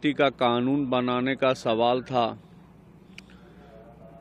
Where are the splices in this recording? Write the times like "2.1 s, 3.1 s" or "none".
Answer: none